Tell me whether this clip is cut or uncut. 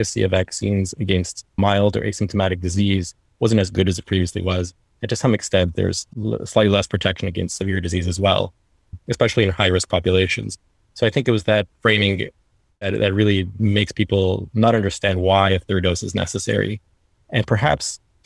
cut